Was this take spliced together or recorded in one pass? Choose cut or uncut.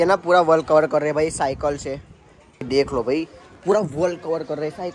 uncut